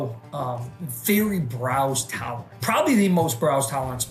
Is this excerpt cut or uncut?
cut